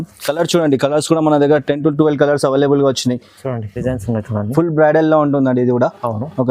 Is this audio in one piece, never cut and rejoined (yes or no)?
no